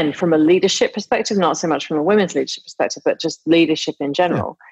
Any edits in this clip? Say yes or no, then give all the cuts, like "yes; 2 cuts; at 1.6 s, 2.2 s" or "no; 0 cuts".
no; 0 cuts